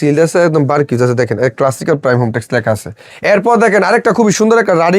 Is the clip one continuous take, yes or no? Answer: no